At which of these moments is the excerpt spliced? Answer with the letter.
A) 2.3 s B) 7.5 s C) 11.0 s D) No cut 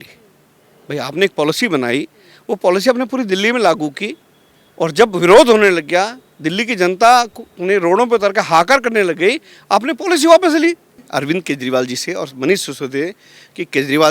C